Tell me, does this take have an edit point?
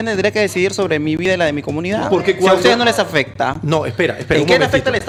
no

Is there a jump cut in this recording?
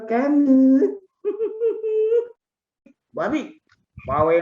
yes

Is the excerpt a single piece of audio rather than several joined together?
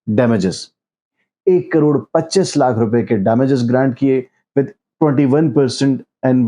no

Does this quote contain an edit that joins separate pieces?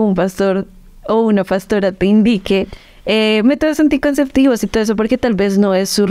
no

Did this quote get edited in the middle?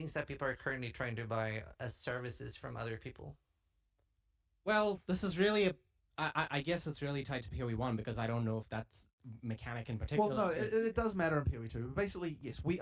yes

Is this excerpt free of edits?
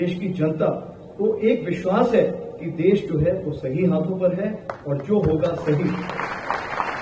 yes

